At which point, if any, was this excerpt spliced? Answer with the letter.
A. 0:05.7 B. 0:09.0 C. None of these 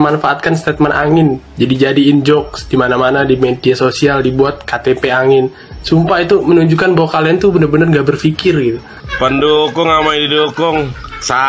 B